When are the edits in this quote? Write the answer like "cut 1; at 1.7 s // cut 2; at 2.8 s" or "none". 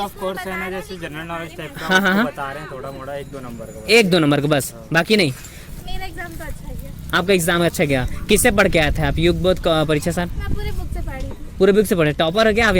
cut 1; at 5.6 s

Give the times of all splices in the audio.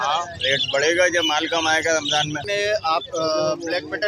cut 1; at 2.4 s

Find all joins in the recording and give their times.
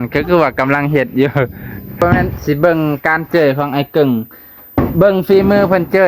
cut 1; at 2.0 s

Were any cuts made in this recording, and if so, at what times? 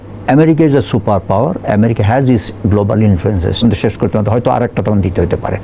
cut 1; at 3.6 s

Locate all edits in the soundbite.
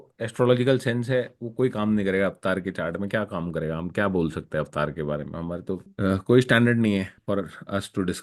cut 1; at 5.9 s // cut 2; at 7.2 s

